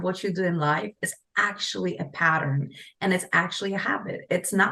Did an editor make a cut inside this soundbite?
no; 0 cuts

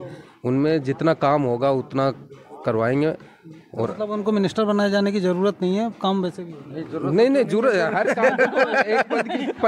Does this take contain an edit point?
no; 0 cuts

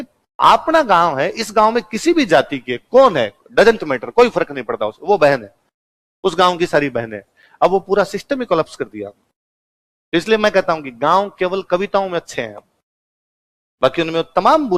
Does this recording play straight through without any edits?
yes; 0 cuts

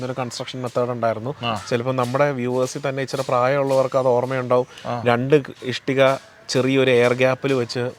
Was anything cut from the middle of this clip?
no; 0 cuts

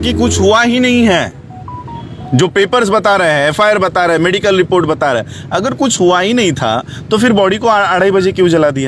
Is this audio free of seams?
yes; 0 cuts

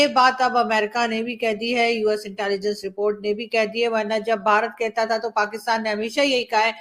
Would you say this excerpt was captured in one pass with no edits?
yes; 0 cuts

